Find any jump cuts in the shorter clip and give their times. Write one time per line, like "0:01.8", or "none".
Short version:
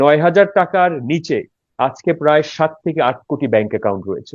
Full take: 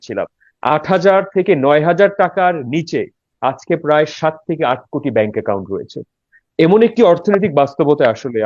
none